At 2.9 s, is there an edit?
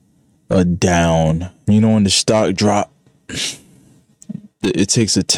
no; 1 cut; at 1.5 s

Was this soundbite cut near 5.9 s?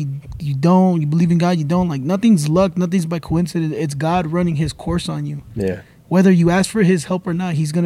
no; 0 cuts

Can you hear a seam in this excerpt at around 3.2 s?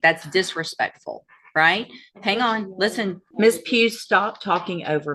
yes; 1 cut; at 3.2 s

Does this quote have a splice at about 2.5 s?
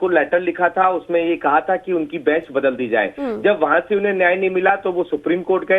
yes; 1 cut; at 2.5 s

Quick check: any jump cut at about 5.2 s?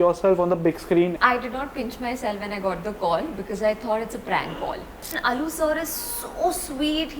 yes; 2 cuts; at 1.1 s, 5.2 s

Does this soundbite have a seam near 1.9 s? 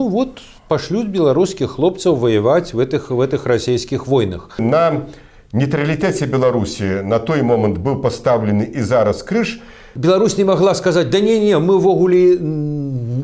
no; 2 cuts; at 4.6 s, 9.9 s

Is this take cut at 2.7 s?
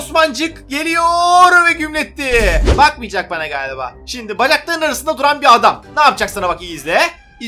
yes; 1 cut; at 2.7 s

